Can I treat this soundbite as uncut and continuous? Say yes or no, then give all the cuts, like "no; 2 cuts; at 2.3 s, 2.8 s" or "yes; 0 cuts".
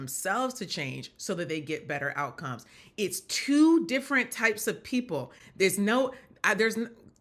yes; 0 cuts